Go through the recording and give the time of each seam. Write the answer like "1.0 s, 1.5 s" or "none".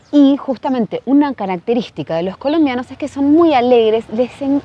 none

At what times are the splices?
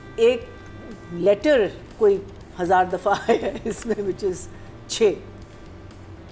none

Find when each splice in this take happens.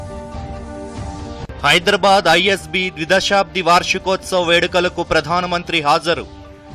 none

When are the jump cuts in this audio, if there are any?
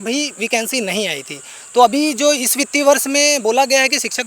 none

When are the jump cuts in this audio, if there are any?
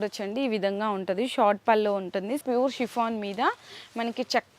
2.4 s

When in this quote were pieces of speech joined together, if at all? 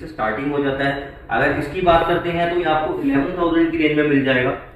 none

